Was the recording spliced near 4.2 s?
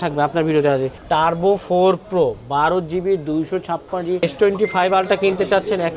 yes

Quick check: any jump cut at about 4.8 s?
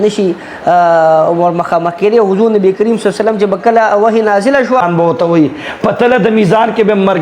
yes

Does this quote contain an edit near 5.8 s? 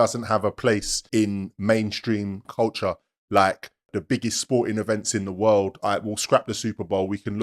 no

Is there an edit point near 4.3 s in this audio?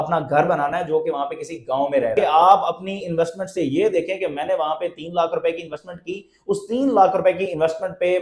no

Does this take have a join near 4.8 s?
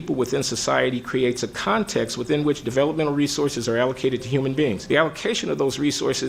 yes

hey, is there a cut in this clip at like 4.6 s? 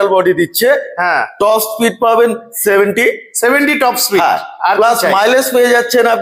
no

